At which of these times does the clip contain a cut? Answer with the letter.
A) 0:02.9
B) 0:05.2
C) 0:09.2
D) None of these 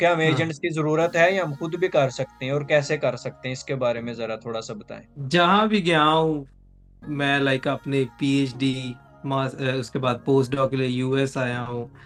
D